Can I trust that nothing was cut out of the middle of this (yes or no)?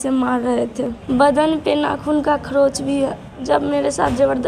no